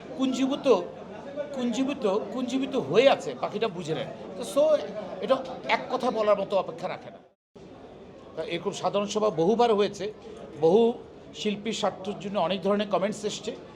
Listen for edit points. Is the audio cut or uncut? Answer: cut